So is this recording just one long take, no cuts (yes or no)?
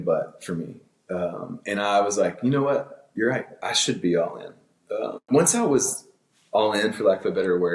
no